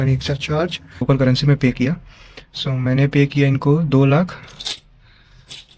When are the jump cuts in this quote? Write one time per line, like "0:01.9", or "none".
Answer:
0:01.0